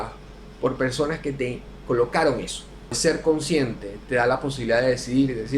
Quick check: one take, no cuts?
no; 1 cut; at 3.0 s

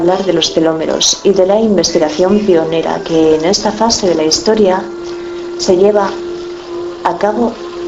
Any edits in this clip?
yes; 1 cut; at 5.0 s

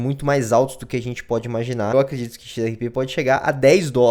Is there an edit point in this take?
yes; 1 cut; at 1.9 s

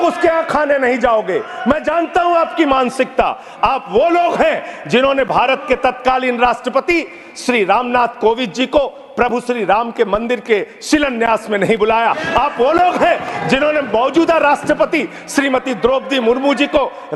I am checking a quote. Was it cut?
no; 0 cuts

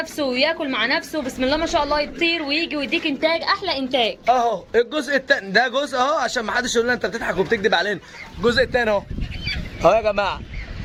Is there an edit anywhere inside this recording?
no; 0 cuts

